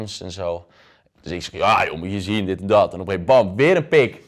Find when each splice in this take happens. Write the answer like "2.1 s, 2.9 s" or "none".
none